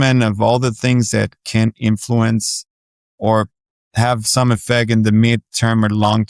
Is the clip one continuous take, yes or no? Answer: yes